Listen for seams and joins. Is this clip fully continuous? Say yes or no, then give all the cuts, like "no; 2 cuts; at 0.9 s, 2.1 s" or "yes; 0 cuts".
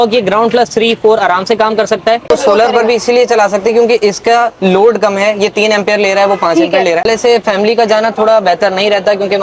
no; 2 cuts; at 2.3 s, 7.1 s